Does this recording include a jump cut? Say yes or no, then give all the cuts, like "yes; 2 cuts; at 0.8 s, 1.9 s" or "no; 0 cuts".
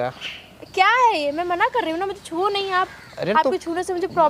no; 0 cuts